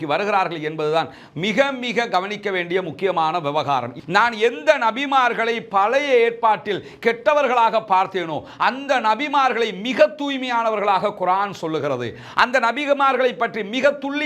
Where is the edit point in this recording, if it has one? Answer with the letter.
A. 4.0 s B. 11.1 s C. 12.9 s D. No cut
A